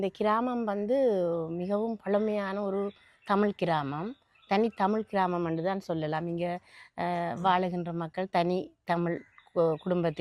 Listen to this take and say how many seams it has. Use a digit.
0